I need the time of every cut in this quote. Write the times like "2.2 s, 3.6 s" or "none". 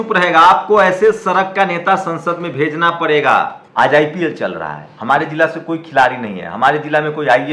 3.6 s